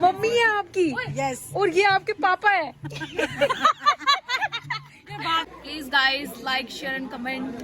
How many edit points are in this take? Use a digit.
1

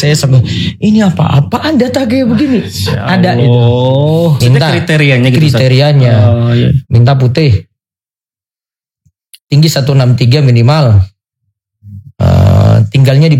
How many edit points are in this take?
1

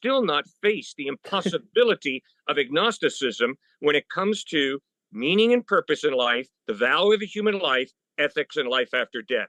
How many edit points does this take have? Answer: 0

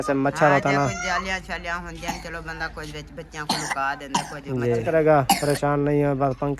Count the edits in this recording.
1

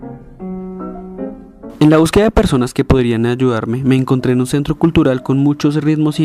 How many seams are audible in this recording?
0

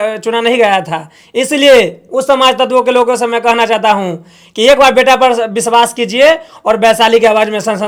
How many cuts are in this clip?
0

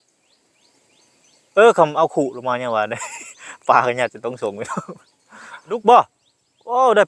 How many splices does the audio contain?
1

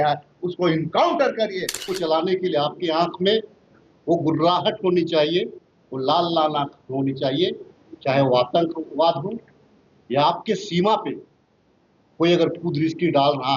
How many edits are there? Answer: 1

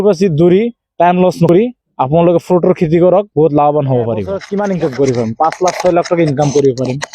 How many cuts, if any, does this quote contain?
2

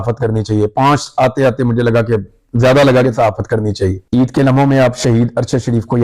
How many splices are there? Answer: 1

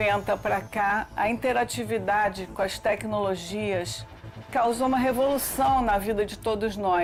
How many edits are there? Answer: 0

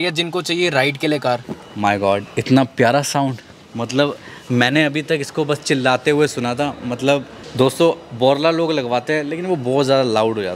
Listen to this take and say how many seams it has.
2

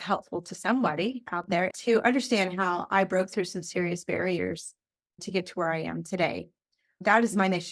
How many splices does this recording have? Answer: 1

